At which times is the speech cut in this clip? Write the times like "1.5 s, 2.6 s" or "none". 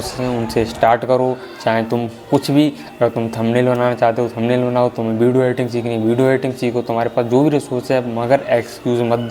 none